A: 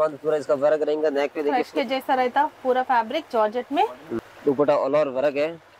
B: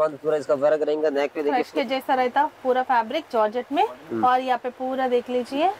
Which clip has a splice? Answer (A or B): A